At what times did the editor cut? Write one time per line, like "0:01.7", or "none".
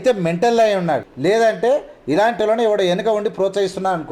0:01.1